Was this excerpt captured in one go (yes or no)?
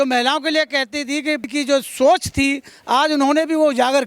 yes